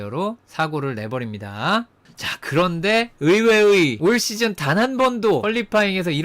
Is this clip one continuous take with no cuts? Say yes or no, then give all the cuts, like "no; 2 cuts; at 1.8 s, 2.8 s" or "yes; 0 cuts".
no; 3 cuts; at 2.0 s, 3.9 s, 5.4 s